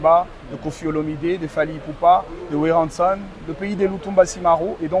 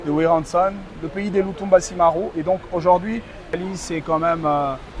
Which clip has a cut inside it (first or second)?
second